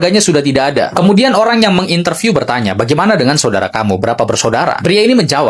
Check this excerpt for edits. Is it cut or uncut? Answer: uncut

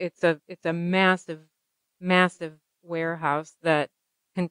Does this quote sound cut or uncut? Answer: uncut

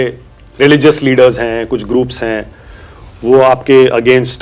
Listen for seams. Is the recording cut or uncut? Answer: uncut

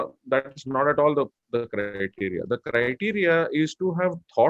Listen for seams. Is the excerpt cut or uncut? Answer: uncut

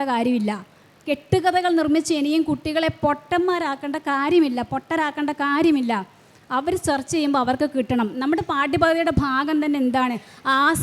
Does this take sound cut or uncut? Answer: uncut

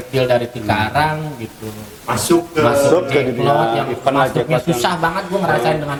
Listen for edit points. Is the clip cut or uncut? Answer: uncut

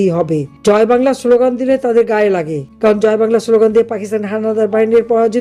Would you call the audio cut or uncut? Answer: uncut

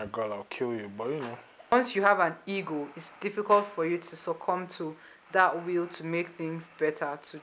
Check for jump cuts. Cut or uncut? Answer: cut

